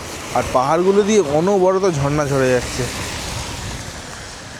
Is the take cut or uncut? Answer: uncut